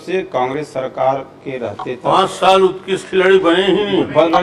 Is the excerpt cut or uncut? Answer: uncut